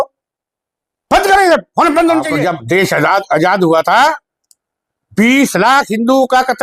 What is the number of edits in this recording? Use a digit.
1